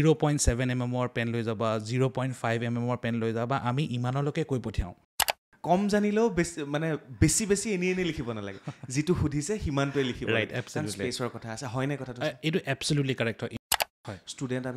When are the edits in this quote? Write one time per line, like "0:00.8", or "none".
0:05.5
0:13.5